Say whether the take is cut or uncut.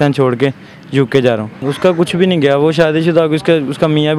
cut